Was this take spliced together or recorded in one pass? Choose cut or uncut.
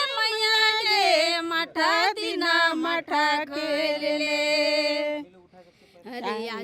uncut